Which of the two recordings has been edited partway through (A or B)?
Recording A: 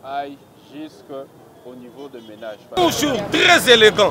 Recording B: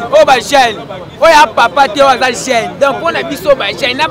A